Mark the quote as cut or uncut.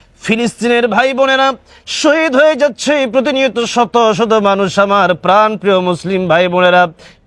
uncut